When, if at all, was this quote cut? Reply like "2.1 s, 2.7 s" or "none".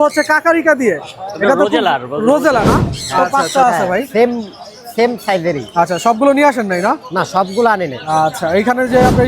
3.3 s